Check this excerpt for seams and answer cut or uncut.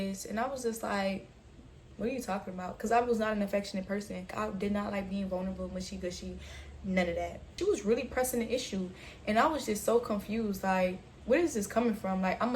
cut